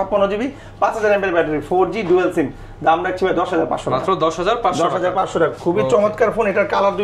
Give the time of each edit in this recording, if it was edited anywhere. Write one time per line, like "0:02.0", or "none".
none